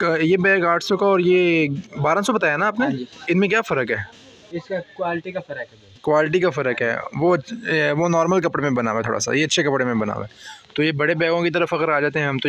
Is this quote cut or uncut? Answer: uncut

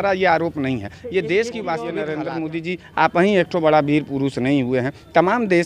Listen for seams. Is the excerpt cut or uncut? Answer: cut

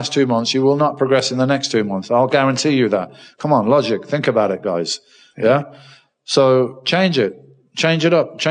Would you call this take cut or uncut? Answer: uncut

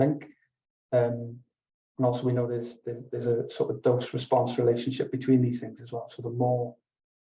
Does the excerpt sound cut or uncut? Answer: uncut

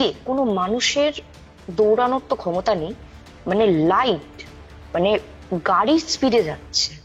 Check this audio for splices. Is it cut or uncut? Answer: uncut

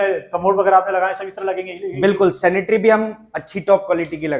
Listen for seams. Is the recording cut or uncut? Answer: uncut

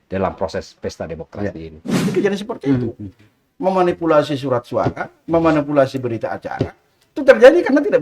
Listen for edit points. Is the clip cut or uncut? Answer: cut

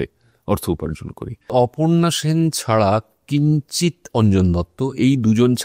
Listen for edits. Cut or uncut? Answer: cut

